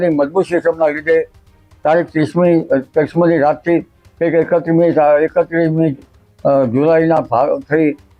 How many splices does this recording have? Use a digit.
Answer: 0